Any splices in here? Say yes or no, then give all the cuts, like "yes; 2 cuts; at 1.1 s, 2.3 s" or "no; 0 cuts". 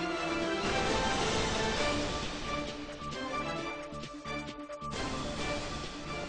no; 0 cuts